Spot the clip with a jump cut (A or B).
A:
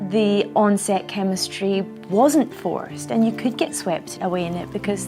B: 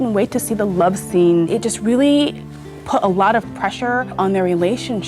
B